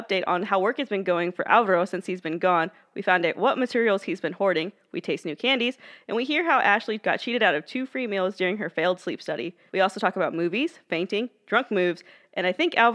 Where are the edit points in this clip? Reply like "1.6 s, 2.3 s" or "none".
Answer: 7.0 s, 9.6 s